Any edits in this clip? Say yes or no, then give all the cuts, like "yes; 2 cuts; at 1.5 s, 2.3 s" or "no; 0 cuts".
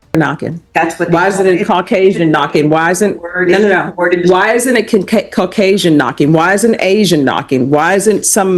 no; 0 cuts